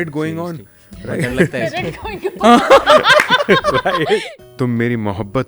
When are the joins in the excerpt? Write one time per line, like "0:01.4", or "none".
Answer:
0:04.4